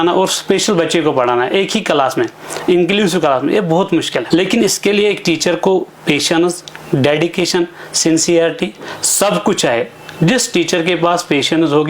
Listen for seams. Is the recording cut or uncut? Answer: cut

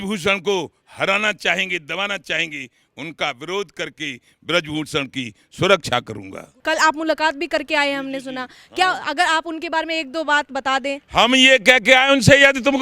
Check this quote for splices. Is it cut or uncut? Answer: uncut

